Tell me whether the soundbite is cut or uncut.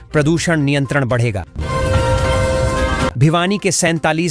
cut